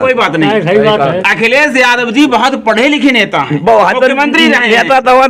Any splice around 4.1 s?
no; 0 cuts

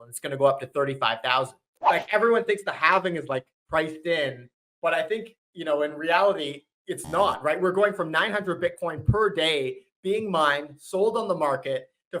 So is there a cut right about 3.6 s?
no; 1 cut; at 1.7 s

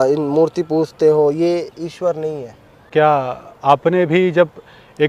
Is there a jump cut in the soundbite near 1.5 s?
no; 1 cut; at 2.9 s

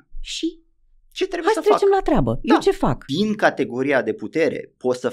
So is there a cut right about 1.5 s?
no; 1 cut; at 3.0 s

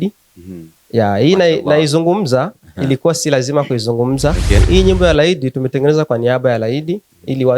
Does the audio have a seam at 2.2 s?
no; 1 cut; at 4.6 s

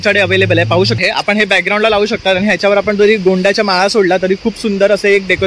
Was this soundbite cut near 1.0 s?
yes; 1 cut; at 1.0 s

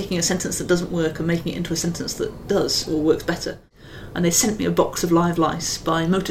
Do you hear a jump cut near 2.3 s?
no; 1 cut; at 3.7 s

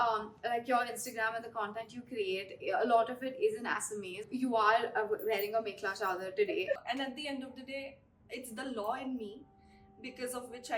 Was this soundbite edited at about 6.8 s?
yes; 2 cuts; at 4.3 s, 6.8 s

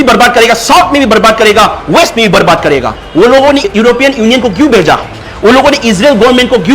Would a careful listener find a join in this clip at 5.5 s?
no; 1 cut; at 3.0 s

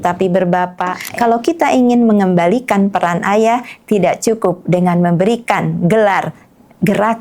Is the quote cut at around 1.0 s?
yes; 1 cut; at 1.0 s

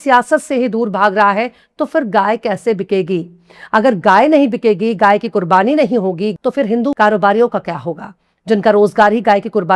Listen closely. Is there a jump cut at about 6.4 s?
yes; 1 cut; at 6.4 s

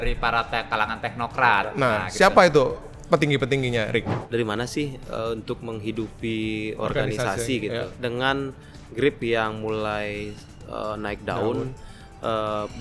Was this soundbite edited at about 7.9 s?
yes; 2 cuts; at 4.2 s, 7.9 s

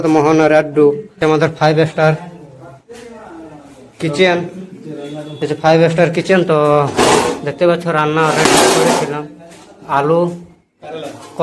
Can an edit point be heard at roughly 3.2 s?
no; 1 cut; at 1.1 s

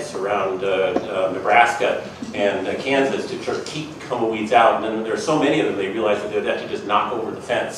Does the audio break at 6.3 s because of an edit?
no; 1 cut; at 2.2 s

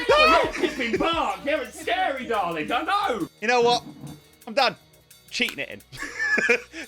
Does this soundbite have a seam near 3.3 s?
yes; 1 cut; at 3.3 s

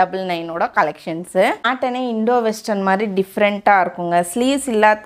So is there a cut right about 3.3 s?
no; 1 cut; at 1.7 s

